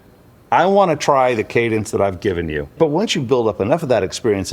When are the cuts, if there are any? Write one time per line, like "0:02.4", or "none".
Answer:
0:02.7